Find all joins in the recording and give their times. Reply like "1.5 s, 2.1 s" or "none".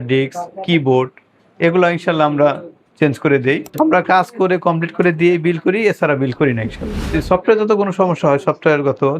3.7 s, 6.9 s